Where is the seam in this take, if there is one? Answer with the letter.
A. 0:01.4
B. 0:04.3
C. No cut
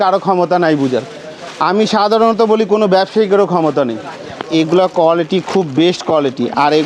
B